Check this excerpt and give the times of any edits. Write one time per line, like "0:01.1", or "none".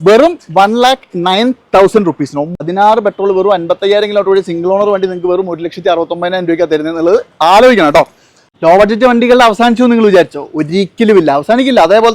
0:02.6
0:08.4